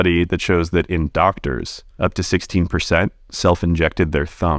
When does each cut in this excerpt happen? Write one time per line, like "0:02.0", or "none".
0:01.8